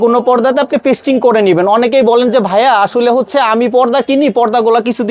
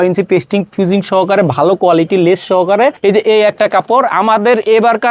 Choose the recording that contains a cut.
second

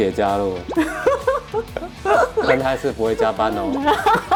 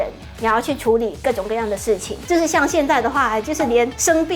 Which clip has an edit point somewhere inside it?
second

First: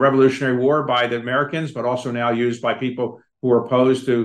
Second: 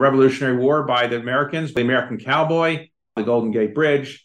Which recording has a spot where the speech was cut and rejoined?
second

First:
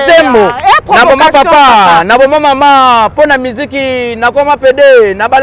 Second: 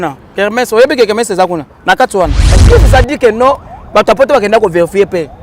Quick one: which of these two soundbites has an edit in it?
second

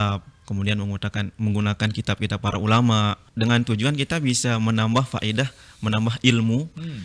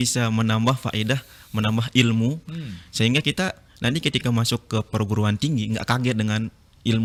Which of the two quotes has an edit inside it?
first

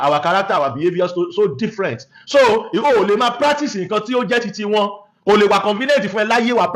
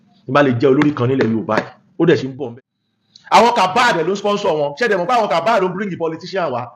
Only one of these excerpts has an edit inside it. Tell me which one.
second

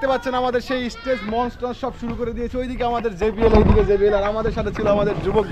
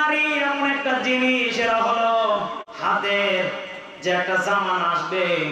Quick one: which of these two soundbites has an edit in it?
second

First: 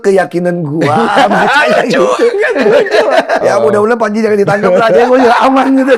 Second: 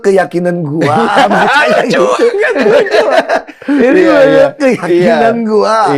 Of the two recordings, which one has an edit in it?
first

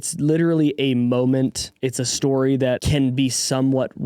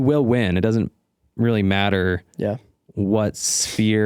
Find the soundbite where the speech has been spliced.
first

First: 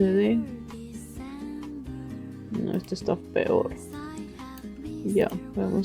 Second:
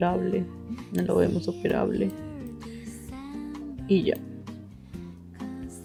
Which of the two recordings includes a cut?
first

